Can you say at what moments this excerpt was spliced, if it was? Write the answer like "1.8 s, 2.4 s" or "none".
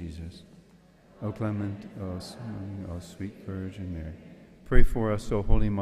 none